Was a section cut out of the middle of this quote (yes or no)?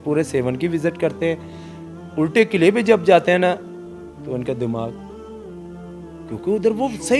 no